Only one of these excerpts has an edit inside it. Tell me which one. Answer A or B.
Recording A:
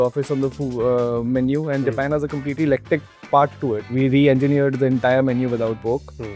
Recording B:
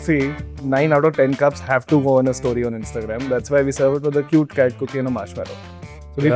A